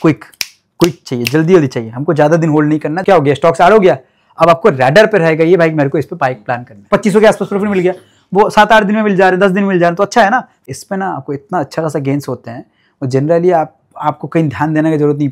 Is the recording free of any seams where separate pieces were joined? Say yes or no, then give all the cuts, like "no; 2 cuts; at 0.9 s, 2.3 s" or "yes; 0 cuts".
no; 3 cuts; at 3.0 s, 6.9 s, 10.5 s